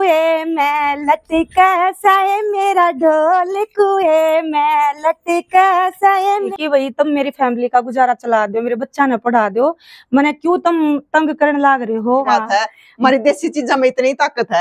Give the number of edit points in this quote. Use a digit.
2